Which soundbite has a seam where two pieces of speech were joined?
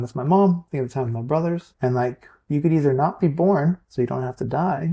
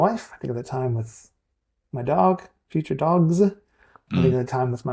first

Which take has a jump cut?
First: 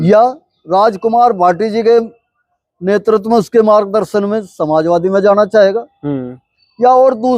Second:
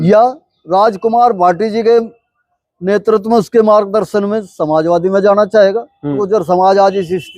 second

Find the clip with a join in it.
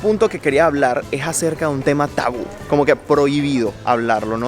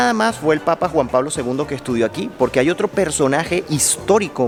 first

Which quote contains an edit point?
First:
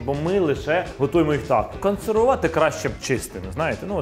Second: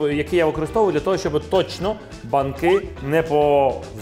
first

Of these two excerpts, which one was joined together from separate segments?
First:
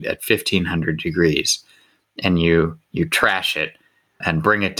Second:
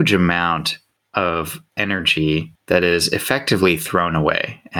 second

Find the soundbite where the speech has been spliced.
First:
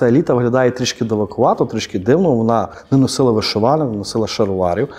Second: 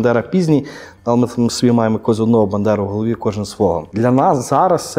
second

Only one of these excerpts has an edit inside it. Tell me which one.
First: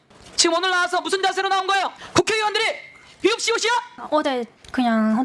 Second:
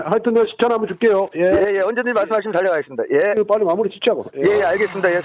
first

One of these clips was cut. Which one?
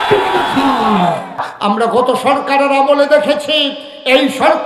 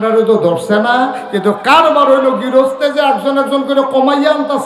first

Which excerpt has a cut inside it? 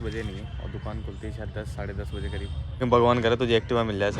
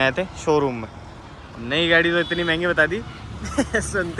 first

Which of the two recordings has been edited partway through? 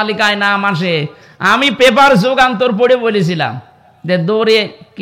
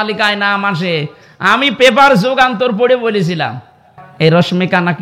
second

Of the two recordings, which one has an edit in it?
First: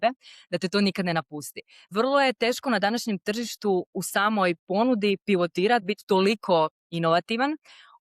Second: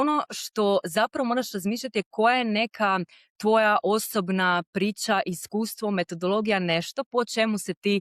first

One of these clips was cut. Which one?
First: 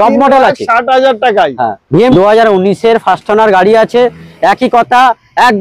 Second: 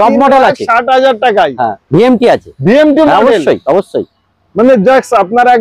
first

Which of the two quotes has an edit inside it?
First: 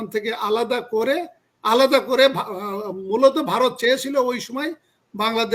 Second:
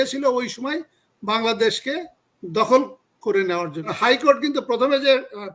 second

